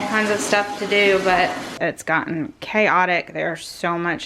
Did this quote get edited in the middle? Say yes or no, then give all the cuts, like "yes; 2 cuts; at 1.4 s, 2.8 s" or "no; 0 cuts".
yes; 1 cut; at 1.7 s